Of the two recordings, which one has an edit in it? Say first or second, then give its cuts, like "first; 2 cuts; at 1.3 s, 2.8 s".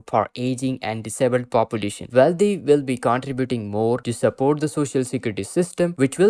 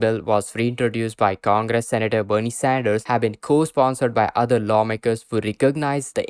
first; 1 cut; at 2.1 s